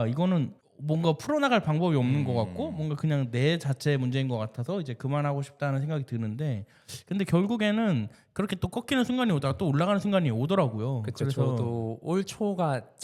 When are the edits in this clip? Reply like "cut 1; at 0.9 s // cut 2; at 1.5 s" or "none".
none